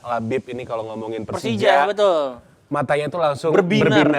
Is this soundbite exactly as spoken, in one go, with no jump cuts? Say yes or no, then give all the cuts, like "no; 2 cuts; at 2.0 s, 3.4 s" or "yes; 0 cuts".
yes; 0 cuts